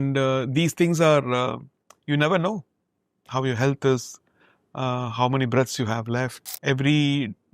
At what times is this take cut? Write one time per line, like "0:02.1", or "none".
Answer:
0:06.4